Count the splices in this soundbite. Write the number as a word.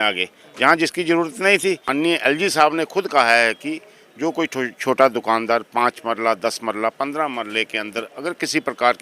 one